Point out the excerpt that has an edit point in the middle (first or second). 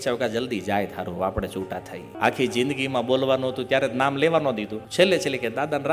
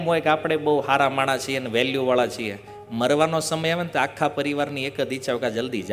first